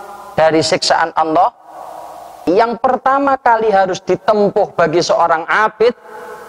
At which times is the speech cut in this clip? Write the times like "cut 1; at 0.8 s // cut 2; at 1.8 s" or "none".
cut 1; at 2.4 s